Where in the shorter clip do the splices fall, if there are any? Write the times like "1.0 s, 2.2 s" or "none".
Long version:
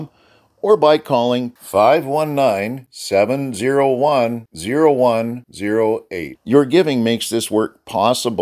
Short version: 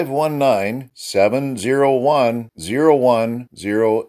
none